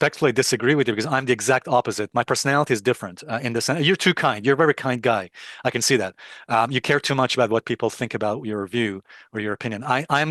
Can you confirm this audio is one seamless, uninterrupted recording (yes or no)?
yes